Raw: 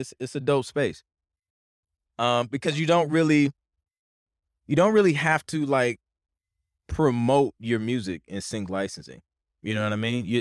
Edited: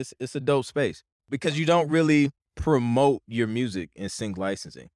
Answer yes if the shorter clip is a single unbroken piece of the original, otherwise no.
no